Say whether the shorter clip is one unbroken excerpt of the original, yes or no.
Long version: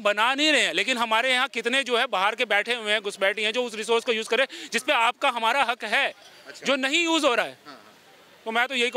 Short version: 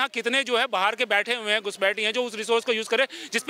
yes